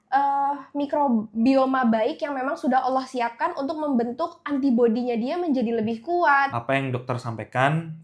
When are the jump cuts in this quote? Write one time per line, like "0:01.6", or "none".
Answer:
0:06.6